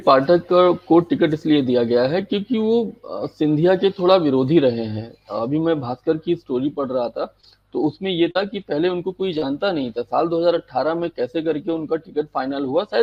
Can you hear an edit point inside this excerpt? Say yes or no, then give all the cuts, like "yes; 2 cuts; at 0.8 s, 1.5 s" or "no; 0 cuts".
no; 0 cuts